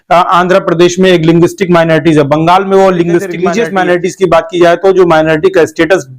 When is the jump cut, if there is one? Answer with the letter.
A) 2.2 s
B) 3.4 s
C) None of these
B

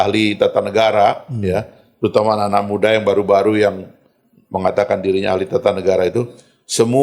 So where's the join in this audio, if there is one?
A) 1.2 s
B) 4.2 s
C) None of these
C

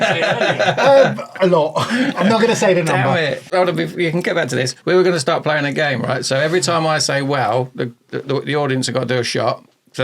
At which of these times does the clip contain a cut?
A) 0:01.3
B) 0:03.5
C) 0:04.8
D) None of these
B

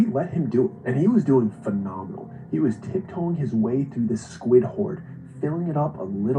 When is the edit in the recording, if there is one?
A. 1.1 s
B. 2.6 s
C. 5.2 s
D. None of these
A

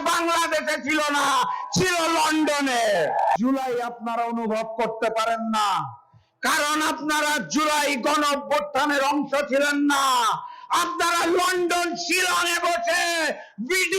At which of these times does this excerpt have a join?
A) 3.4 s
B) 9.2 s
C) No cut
A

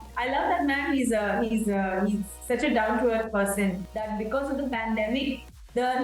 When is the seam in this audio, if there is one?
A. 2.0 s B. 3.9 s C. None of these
B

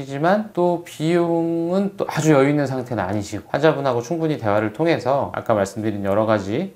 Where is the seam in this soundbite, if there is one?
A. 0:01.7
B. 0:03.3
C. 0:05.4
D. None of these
B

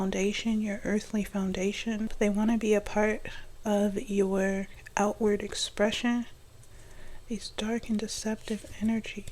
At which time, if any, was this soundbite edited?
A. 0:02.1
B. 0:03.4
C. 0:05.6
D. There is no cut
A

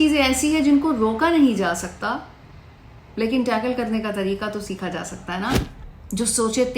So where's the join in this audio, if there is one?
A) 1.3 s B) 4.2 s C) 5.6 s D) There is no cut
C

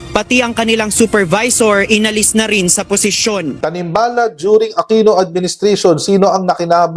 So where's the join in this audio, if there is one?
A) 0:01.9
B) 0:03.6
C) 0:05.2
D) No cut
B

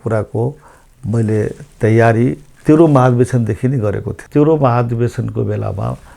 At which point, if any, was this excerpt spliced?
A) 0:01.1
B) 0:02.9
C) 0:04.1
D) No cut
C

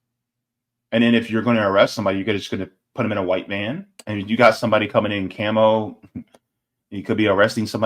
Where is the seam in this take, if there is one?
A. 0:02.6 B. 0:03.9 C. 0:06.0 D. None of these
B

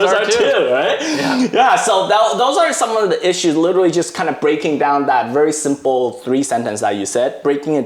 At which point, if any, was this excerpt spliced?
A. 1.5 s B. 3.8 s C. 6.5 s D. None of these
D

